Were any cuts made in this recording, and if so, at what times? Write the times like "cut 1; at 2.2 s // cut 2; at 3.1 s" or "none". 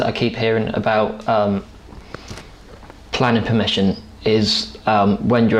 none